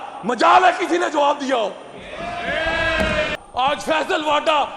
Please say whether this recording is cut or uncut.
cut